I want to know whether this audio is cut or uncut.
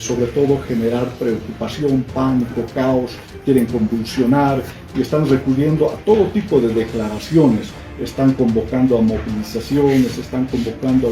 uncut